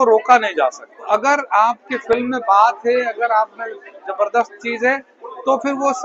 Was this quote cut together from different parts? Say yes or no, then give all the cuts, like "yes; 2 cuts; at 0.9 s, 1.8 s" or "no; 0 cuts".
yes; 1 cut; at 1.1 s